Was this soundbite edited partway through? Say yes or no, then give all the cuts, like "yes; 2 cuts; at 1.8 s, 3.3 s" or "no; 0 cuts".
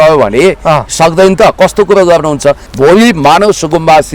yes; 1 cut; at 2.7 s